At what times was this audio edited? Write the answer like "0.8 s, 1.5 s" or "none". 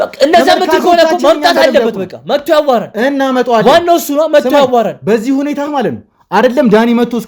none